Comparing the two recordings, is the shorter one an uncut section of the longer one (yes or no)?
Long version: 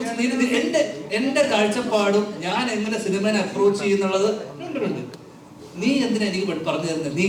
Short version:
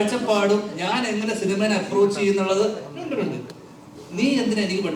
yes